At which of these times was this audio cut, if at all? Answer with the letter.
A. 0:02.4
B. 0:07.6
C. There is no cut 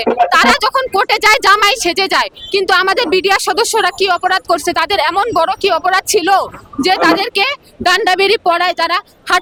C